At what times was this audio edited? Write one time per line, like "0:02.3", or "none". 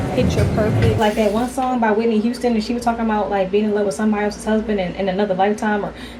0:00.9